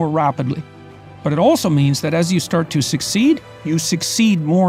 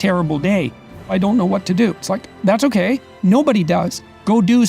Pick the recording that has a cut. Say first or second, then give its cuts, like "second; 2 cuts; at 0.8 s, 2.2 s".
second; 1 cut; at 1.1 s